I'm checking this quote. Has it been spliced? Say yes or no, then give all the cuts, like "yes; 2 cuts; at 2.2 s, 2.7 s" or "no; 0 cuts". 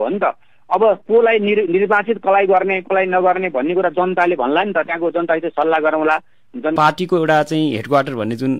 yes; 1 cut; at 6.7 s